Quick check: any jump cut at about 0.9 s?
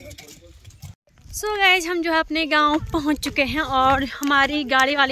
yes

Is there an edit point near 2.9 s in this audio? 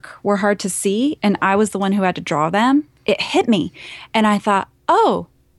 yes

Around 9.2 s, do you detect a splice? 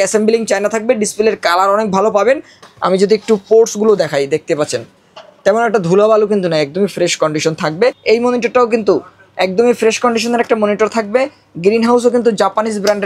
no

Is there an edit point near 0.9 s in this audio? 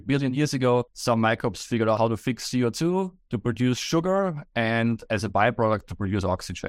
yes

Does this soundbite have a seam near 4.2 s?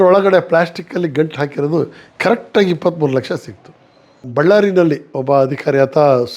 yes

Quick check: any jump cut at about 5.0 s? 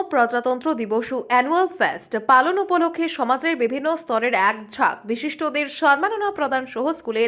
no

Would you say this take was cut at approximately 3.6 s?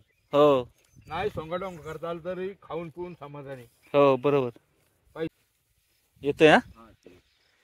no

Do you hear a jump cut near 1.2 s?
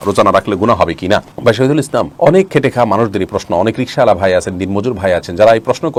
no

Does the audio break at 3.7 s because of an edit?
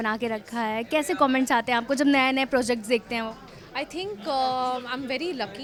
no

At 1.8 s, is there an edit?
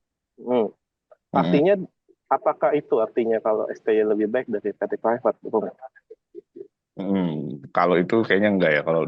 no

